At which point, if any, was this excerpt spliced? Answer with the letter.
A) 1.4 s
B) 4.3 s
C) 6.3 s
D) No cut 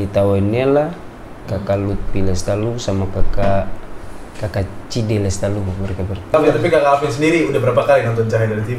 C